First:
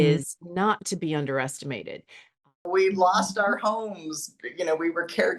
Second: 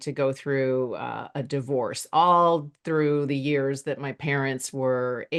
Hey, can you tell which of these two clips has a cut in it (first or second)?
first